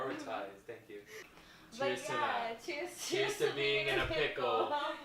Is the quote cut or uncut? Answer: cut